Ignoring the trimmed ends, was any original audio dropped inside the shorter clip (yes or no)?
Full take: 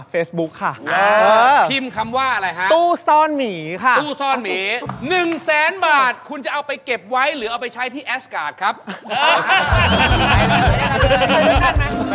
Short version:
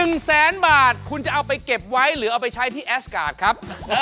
no